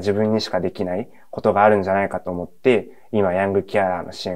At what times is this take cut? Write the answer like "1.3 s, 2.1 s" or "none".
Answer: none